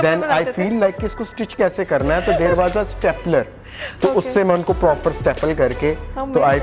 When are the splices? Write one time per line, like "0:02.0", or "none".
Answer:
none